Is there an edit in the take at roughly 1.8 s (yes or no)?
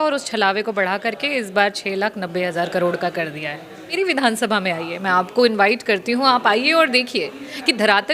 no